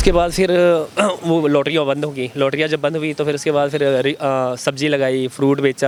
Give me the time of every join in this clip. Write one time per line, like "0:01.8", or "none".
none